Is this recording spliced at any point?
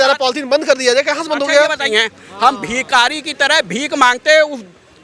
yes; 1 cut; at 1.8 s

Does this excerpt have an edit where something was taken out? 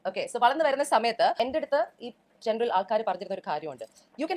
yes; 1 cut; at 1.3 s

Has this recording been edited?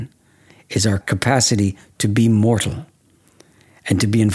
yes; 1 cut; at 1.0 s

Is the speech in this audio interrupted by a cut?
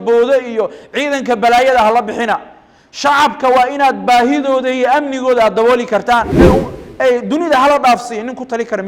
yes; 1 cut; at 6.3 s

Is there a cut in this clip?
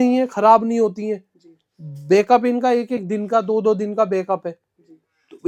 no; 0 cuts

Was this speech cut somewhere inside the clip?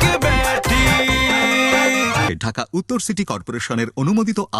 yes; 1 cut; at 2.3 s

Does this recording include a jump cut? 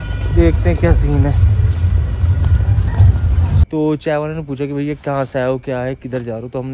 yes; 1 cut; at 3.6 s

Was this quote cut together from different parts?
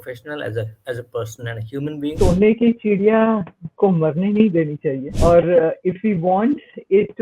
yes; 2 cuts; at 2.1 s, 5.1 s

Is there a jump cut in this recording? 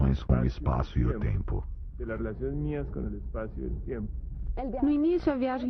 no; 0 cuts

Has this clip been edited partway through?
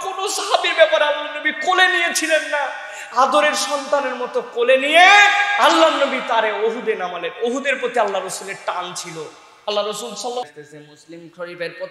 yes; 1 cut; at 10.5 s

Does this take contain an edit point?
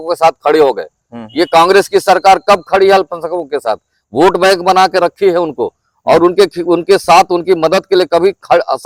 no; 0 cuts

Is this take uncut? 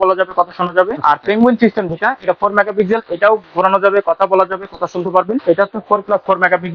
no; 2 cuts; at 1.0 s, 5.4 s

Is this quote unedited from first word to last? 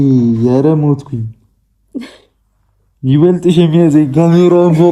yes; 0 cuts

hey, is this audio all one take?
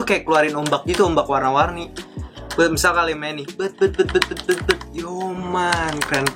yes; 0 cuts

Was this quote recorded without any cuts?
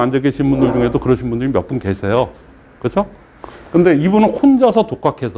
yes; 0 cuts

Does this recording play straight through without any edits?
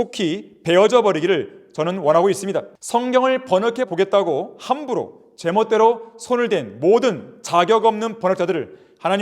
no; 1 cut; at 2.8 s

